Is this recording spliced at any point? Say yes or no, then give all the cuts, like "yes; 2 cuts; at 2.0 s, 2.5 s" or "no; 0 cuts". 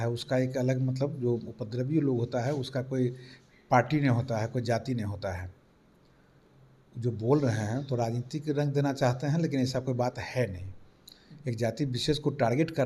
no; 0 cuts